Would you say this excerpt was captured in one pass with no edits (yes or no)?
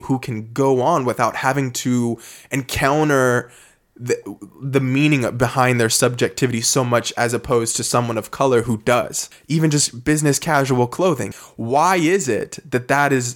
no